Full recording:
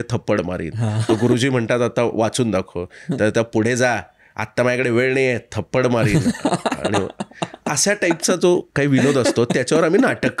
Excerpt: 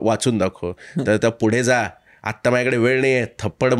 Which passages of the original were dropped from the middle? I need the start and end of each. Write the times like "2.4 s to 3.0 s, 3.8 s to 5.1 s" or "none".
none